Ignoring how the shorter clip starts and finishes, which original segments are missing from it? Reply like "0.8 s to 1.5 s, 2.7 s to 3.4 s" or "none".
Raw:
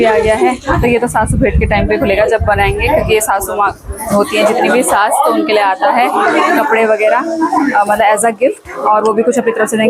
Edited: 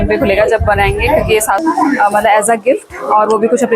3.4 s to 7.4 s